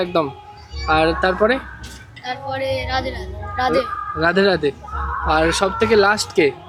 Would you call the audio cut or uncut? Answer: uncut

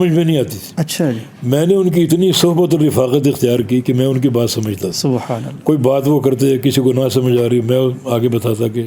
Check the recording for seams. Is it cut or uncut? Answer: uncut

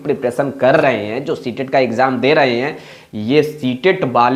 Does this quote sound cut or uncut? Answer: uncut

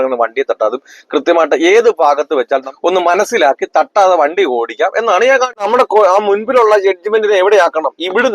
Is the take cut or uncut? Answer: cut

